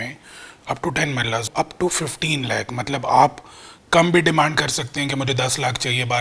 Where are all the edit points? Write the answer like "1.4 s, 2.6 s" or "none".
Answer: 1.5 s

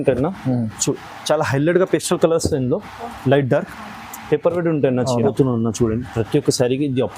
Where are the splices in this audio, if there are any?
5.3 s

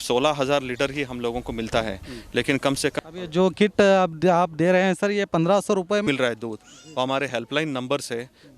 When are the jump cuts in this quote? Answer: 2.9 s, 6.1 s

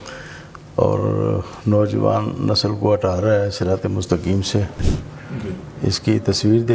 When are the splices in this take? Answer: 5.0 s

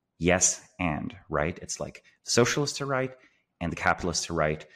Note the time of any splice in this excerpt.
none

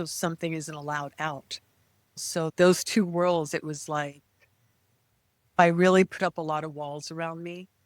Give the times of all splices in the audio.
2.2 s, 5.6 s

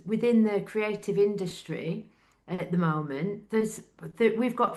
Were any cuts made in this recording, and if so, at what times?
none

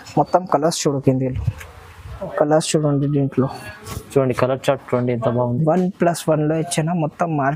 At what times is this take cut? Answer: none

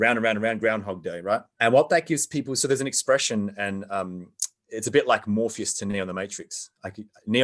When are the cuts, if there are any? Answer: 1.5 s

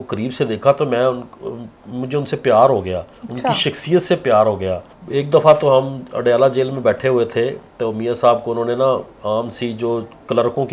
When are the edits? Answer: none

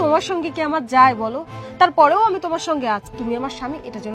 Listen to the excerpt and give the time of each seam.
3.1 s

